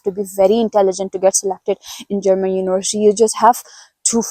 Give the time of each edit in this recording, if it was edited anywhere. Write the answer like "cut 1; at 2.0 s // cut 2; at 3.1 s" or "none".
none

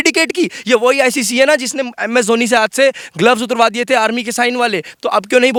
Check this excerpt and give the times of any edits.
none

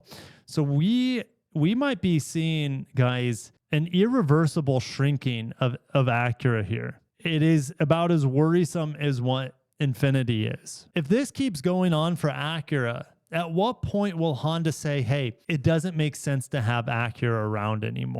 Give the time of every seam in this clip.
cut 1; at 7.0 s // cut 2; at 10.8 s

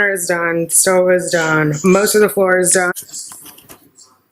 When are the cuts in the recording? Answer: cut 1; at 2.9 s

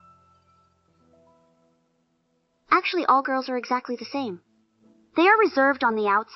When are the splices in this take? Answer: none

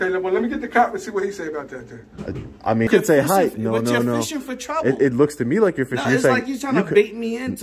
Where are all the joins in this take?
cut 1; at 2.9 s

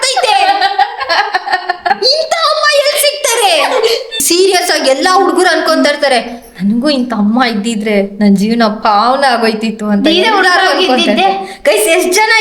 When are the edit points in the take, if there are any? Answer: cut 1; at 1.9 s // cut 2; at 4.2 s

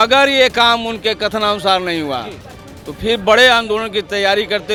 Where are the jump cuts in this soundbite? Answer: none

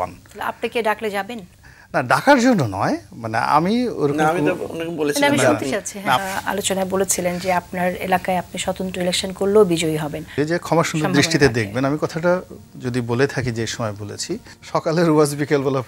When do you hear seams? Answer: cut 1; at 6.2 s // cut 2; at 10.3 s // cut 3; at 14.5 s

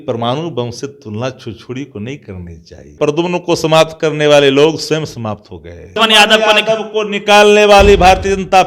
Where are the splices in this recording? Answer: cut 1; at 2.9 s // cut 2; at 5.9 s

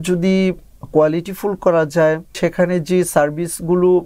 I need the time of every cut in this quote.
cut 1; at 2.4 s

